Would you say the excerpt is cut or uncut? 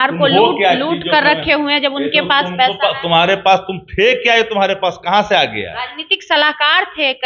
uncut